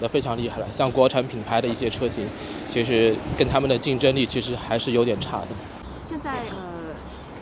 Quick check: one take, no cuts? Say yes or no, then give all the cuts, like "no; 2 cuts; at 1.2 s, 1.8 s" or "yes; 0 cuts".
no; 1 cut; at 5.9 s